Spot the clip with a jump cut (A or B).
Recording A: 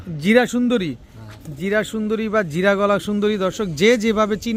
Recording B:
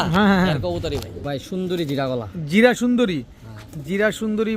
B